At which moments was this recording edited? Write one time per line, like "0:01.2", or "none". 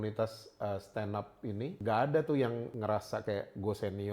0:01.7
0:02.7